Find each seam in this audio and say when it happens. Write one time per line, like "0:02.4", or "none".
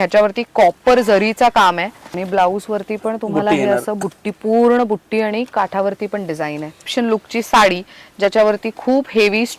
0:02.0
0:06.9